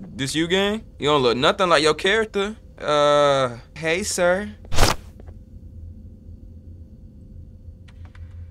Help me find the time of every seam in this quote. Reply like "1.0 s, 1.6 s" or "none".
0.9 s, 2.7 s, 3.7 s